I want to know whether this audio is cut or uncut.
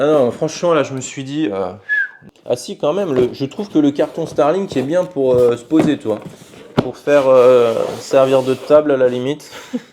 cut